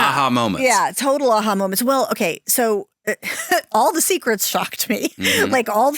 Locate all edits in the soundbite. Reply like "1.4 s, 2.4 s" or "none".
none